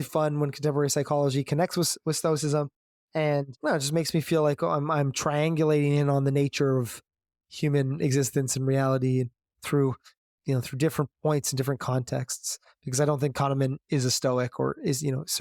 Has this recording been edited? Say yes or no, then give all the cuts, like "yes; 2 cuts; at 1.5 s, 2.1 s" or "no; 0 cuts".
no; 0 cuts